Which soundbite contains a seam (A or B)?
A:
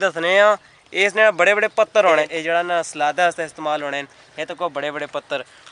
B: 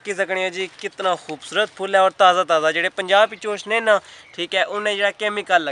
A